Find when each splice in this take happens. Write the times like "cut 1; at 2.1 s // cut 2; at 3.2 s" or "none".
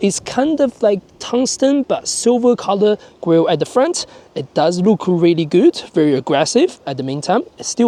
none